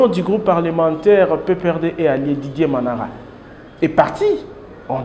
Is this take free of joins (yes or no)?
yes